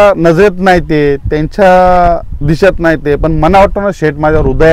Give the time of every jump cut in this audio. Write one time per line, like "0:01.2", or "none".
none